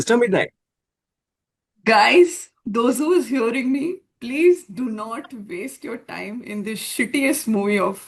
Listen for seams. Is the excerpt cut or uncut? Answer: uncut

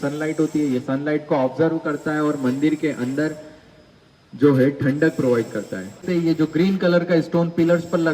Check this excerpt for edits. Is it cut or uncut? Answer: cut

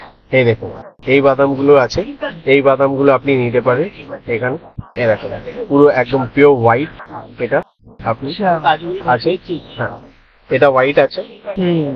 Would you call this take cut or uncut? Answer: uncut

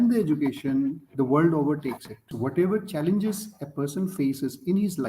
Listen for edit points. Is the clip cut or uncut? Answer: cut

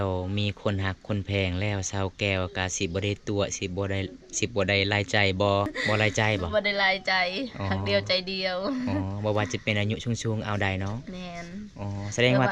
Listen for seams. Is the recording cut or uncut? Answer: cut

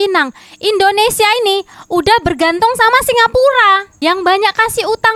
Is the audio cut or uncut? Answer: uncut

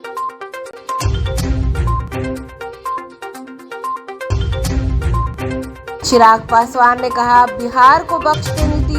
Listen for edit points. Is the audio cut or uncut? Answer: cut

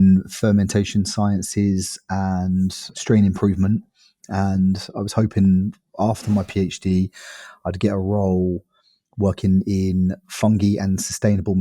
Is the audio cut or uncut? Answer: cut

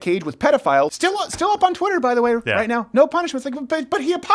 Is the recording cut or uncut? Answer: cut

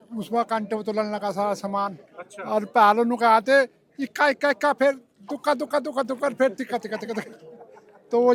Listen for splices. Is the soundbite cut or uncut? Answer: uncut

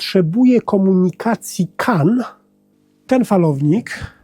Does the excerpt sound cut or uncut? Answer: cut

